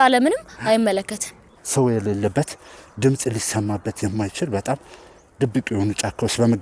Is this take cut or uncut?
cut